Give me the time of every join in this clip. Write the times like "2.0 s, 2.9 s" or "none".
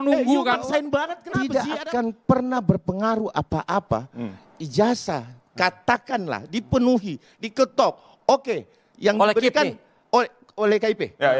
1.2 s